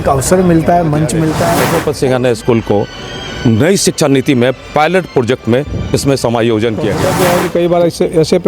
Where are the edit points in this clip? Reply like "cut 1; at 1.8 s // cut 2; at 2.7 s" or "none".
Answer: cut 1; at 1.6 s // cut 2; at 7.1 s